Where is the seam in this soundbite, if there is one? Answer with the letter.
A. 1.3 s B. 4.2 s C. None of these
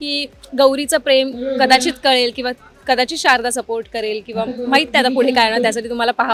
C